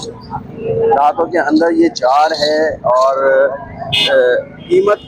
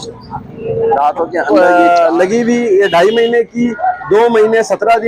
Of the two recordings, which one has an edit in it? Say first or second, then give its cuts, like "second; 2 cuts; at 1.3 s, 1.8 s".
second; 1 cut; at 1.4 s